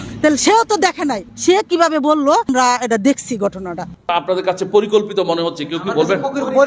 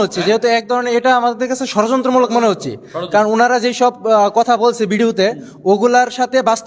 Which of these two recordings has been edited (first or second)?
first